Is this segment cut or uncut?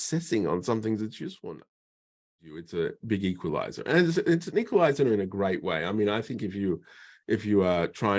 cut